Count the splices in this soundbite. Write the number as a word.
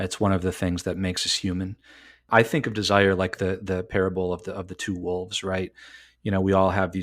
one